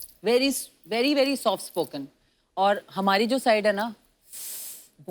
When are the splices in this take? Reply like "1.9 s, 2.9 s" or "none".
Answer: none